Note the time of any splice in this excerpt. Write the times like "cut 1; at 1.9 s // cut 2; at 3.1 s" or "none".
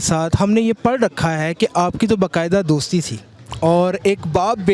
none